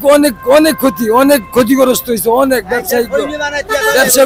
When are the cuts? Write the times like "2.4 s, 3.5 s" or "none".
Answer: none